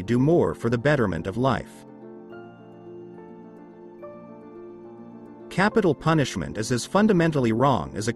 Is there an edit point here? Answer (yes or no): no